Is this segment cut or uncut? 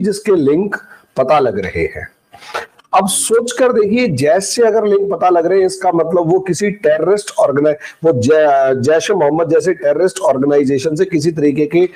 uncut